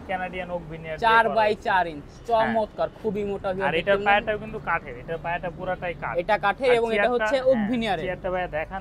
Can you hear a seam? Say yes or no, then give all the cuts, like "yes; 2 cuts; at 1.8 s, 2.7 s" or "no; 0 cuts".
no; 0 cuts